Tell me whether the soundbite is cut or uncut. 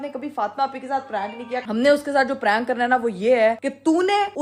cut